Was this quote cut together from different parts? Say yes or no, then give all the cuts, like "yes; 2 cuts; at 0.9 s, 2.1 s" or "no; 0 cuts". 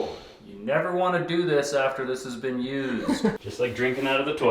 yes; 1 cut; at 3.3 s